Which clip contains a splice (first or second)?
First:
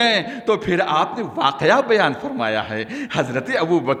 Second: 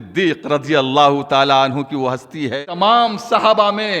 second